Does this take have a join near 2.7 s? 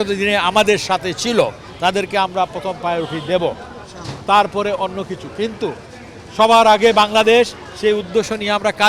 no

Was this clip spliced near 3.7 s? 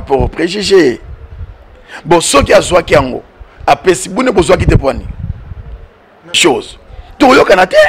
no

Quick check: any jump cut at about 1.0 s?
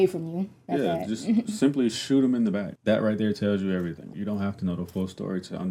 no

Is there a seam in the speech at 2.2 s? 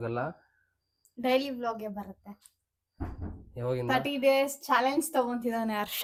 no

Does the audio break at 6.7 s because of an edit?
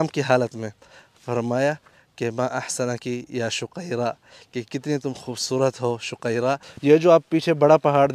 yes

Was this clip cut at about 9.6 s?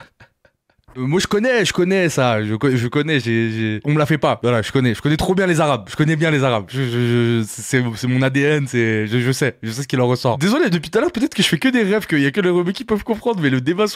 no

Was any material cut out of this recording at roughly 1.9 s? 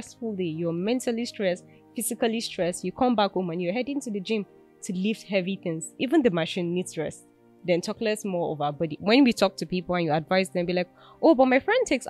no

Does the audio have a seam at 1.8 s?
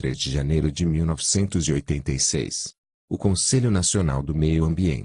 no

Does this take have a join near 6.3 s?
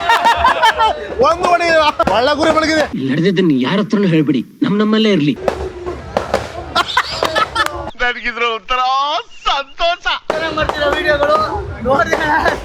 no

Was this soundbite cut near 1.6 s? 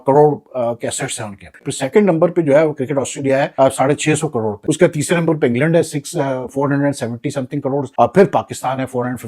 yes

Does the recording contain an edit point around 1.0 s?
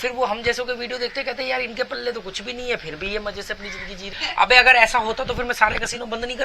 no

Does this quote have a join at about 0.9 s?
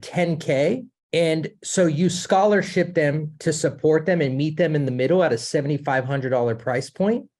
yes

